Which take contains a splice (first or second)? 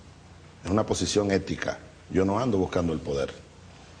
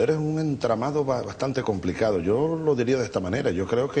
second